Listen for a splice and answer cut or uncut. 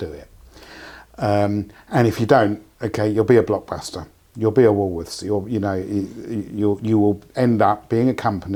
uncut